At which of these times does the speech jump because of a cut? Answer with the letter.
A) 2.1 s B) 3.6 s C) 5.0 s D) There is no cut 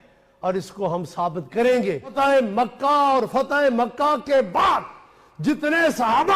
A